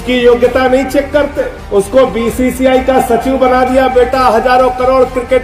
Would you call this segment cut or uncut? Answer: uncut